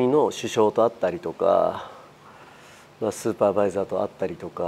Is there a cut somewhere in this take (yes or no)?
no